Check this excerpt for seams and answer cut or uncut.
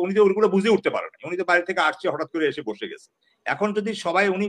uncut